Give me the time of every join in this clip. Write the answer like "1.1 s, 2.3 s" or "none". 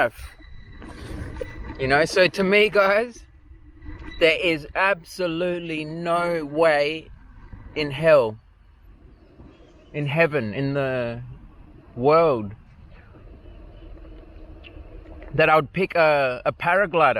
none